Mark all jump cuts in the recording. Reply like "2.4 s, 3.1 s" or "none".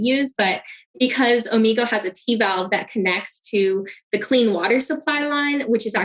none